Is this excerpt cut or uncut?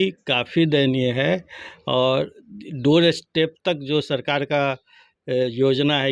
uncut